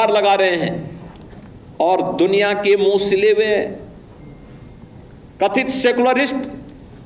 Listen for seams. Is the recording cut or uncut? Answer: uncut